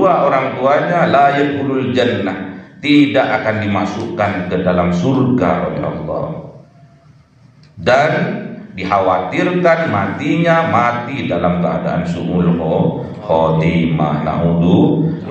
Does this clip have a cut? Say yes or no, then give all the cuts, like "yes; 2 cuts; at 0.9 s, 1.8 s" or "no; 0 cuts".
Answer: no; 0 cuts